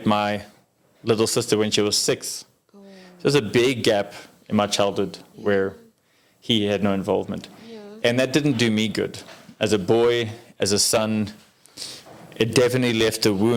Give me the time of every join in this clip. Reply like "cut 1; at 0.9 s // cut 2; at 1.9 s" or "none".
none